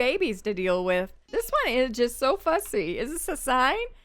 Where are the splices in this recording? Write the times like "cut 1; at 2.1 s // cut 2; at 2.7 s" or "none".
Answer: cut 1; at 1.2 s